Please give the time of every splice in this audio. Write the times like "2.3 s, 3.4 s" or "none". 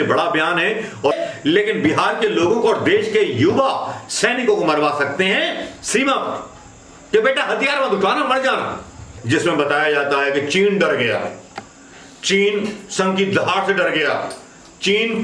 1.1 s, 9.2 s